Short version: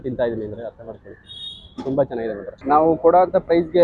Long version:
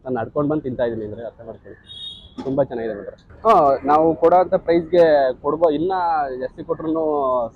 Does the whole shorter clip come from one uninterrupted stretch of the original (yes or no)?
no